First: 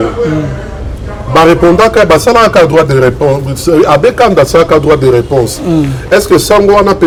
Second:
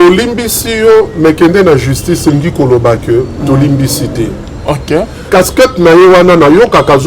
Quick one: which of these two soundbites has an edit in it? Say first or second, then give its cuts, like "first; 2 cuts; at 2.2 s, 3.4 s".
second; 1 cut; at 5.3 s